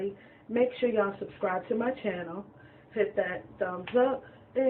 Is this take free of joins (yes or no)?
yes